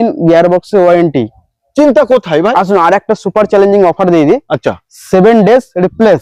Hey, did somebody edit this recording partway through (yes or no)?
no